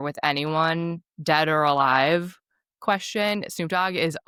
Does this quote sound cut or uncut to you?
uncut